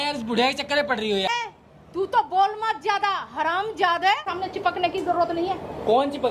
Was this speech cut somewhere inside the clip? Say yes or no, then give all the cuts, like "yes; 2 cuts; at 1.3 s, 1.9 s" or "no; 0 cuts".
yes; 2 cuts; at 1.3 s, 4.3 s